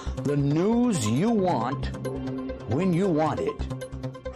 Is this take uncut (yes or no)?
yes